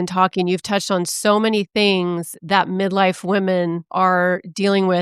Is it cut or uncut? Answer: cut